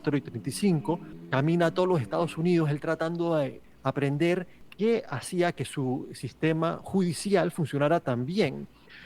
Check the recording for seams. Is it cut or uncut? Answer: cut